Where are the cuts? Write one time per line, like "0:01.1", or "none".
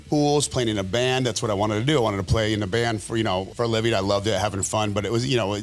none